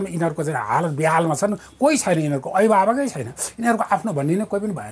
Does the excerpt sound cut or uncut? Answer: uncut